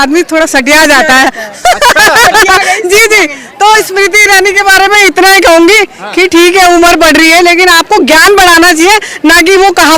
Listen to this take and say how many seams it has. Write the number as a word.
zero